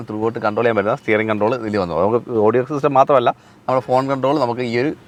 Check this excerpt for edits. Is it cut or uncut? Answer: uncut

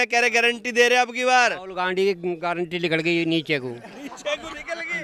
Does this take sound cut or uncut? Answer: uncut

